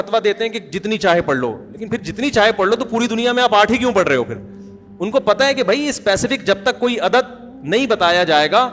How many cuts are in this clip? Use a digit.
0